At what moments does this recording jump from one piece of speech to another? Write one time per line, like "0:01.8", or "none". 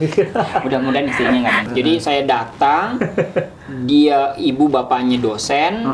0:01.6